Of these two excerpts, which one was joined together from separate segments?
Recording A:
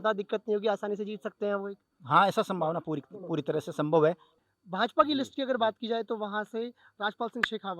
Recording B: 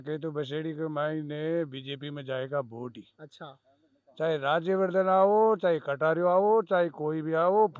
A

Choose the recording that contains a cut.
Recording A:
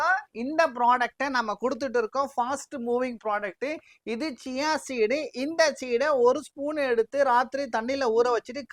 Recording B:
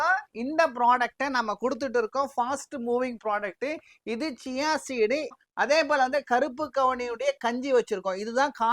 B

